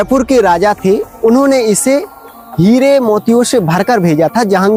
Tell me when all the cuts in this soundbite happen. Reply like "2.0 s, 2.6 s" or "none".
none